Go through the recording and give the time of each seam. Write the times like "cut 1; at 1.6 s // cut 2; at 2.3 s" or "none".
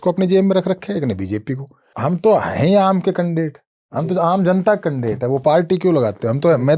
cut 1; at 1.9 s